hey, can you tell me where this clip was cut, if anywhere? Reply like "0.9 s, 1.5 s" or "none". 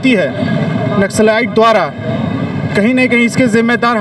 none